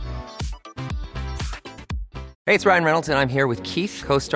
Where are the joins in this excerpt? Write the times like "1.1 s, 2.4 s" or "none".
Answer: 2.3 s